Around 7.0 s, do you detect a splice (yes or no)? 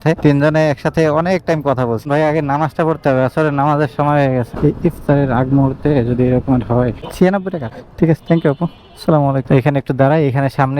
yes